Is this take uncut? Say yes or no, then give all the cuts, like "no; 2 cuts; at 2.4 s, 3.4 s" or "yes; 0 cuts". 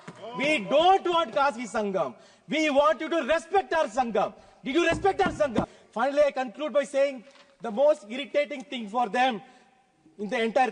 no; 1 cut; at 5.8 s